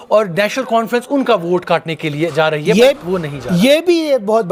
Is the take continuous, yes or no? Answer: yes